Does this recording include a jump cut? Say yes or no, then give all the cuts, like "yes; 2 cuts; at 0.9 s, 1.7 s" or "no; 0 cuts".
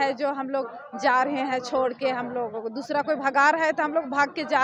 no; 0 cuts